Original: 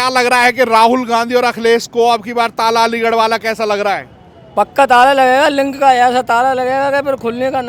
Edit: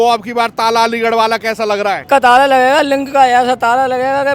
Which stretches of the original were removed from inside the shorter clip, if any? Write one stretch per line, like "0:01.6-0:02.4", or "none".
0:04.0-0:04.7